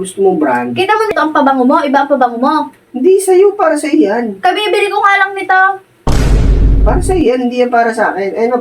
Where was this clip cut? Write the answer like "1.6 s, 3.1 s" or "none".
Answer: 1.1 s